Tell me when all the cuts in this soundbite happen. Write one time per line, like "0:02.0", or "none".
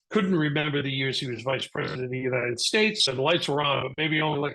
0:03.1